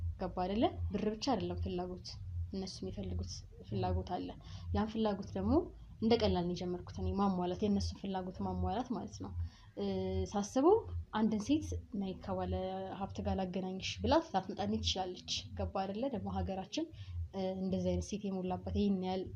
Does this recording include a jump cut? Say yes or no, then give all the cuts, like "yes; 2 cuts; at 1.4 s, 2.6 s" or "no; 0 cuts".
no; 0 cuts